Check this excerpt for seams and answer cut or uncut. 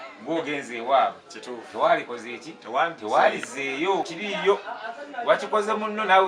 cut